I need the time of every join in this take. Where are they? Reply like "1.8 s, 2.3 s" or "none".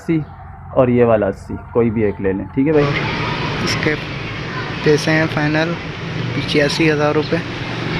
2.8 s